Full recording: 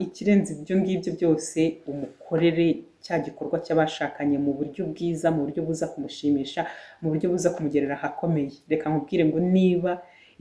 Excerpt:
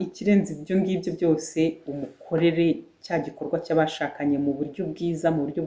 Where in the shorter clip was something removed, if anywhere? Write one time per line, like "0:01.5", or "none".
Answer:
none